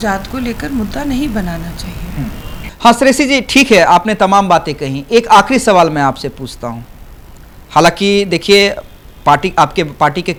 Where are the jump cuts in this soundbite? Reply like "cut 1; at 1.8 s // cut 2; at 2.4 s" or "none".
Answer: none